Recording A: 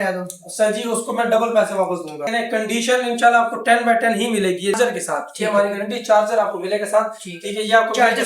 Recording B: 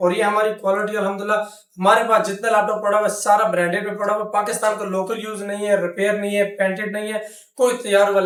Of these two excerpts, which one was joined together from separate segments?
A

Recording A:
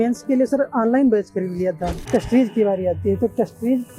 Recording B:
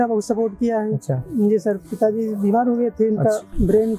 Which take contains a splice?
A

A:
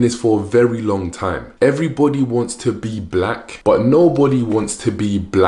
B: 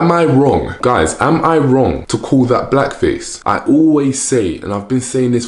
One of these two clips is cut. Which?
B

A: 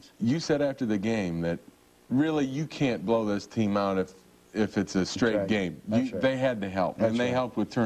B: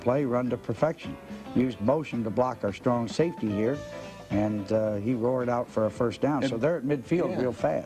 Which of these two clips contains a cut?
B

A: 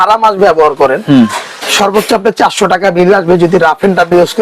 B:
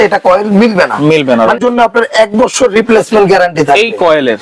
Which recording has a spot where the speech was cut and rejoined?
B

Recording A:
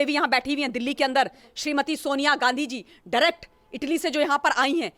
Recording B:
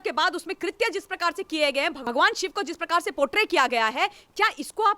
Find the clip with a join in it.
B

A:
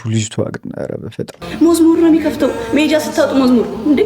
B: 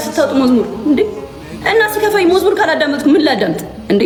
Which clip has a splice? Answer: A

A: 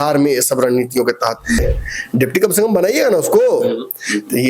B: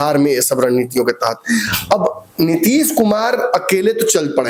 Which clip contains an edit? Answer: A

